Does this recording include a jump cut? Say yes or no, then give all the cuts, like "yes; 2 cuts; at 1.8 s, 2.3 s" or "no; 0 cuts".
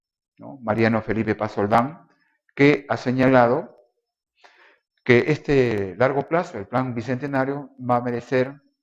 yes; 1 cut; at 6.3 s